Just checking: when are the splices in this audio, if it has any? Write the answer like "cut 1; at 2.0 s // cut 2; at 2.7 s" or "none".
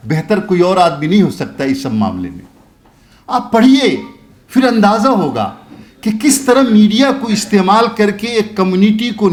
none